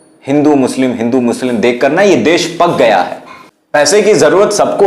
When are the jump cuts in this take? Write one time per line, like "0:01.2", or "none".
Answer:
0:03.9

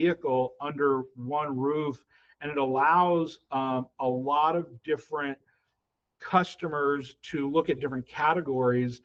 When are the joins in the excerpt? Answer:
none

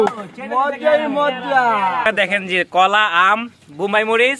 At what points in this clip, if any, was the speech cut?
0:02.1

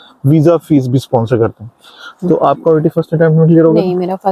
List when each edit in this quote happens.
0:02.2

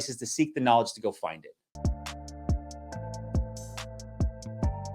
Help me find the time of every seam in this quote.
0:01.6

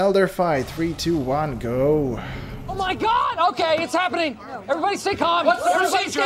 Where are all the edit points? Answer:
none

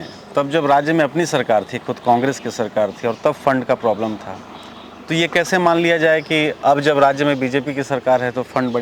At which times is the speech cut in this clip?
none

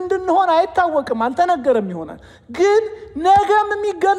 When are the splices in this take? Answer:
none

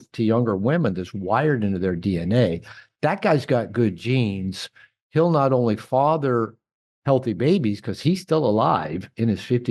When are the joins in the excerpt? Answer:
none

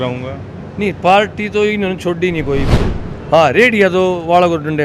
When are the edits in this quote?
0:02.7

